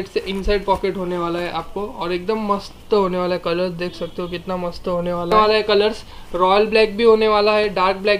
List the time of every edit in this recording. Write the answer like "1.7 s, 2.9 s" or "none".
5.3 s